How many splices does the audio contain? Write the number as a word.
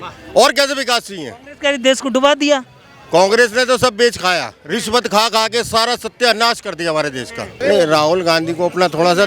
one